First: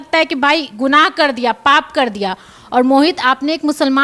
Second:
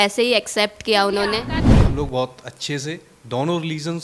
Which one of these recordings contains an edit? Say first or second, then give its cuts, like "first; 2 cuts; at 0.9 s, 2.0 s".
second; 1 cut; at 1.6 s